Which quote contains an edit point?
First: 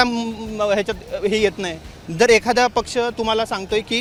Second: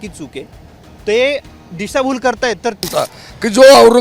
second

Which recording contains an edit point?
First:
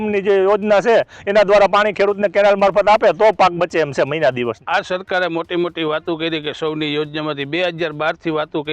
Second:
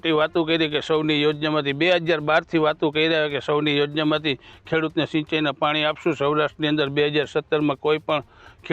first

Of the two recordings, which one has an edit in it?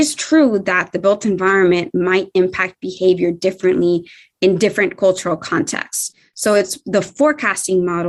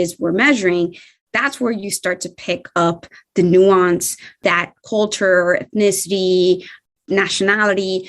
second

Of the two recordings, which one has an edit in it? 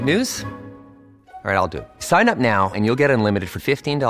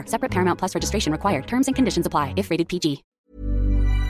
second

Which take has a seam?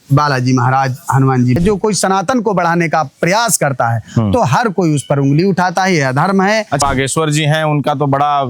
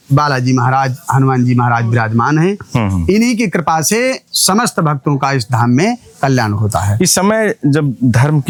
first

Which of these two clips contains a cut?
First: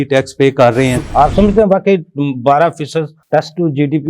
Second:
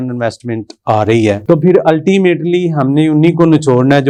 first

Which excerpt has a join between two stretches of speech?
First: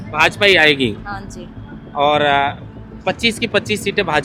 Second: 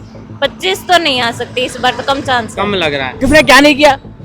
second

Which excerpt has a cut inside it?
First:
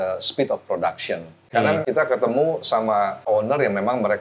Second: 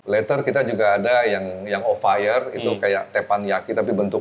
first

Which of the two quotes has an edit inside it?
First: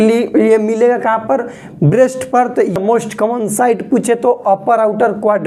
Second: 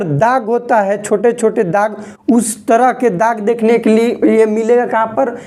first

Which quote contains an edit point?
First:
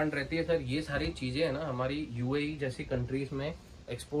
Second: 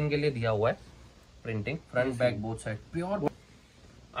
second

